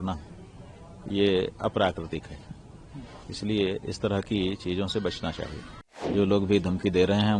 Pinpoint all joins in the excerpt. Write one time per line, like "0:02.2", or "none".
0:06.1